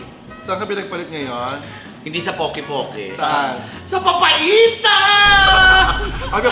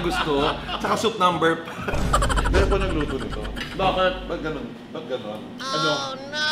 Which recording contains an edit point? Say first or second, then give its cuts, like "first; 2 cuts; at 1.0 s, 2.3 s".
second; 1 cut; at 2.4 s